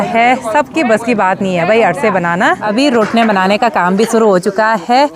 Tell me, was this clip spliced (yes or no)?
yes